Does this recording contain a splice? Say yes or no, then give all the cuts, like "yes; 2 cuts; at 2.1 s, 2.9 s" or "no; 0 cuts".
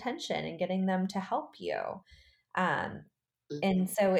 no; 0 cuts